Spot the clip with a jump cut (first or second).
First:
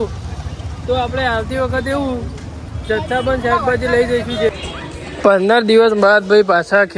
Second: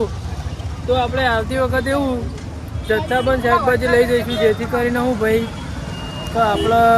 first